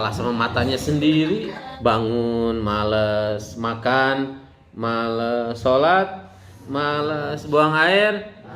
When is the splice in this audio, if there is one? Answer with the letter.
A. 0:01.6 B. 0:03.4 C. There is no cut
A